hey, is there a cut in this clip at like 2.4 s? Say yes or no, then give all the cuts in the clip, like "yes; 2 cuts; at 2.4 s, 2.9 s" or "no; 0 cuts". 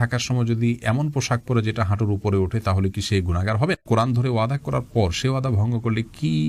no; 1 cut; at 3.8 s